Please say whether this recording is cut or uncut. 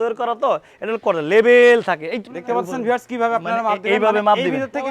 cut